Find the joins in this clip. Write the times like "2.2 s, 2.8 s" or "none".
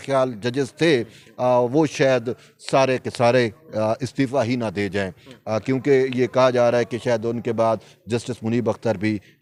none